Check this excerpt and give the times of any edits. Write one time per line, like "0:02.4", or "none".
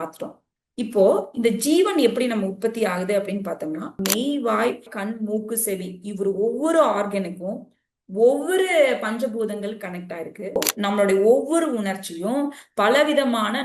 0:03.9
0:10.6